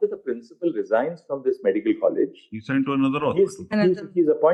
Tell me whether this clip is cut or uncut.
uncut